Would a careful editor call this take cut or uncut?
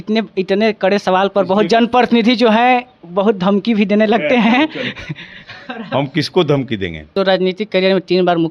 cut